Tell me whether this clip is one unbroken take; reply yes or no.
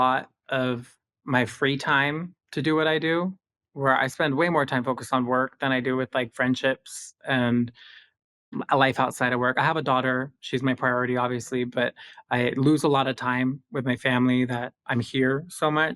yes